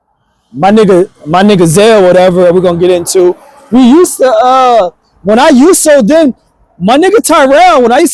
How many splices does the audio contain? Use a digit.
0